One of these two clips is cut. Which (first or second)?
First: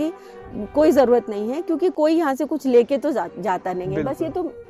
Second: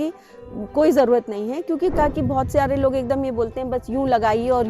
second